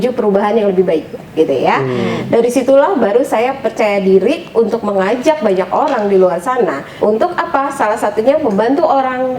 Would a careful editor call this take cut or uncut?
cut